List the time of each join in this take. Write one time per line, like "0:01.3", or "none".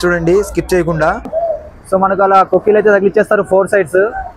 0:01.2